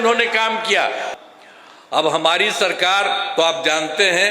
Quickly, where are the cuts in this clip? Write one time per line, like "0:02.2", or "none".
0:01.1